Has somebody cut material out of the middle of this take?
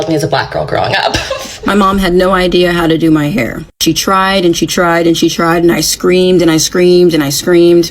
yes; 1 cut; at 1.5 s

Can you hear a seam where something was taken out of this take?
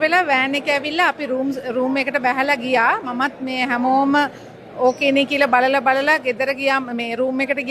no; 0 cuts

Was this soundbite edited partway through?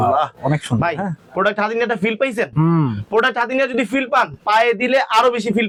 no; 0 cuts

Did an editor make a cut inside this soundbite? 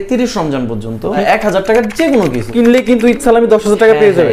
yes; 2 cuts; at 1.2 s, 2.5 s

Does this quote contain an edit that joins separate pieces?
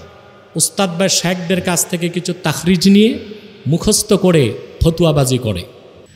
no; 0 cuts

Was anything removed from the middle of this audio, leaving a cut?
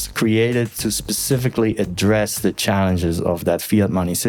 no; 0 cuts

